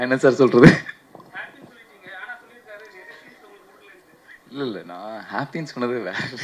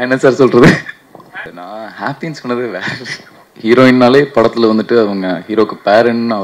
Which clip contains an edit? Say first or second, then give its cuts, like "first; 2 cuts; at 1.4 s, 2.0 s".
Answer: second; 2 cuts; at 1.5 s, 3.4 s